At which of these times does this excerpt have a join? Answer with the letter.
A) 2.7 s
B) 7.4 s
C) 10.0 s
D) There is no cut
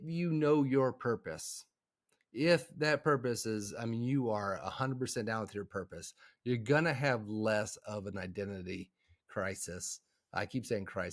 D